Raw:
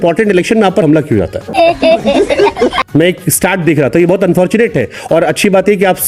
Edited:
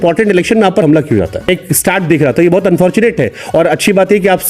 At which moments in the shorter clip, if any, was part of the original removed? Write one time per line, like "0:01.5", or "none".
0:01.5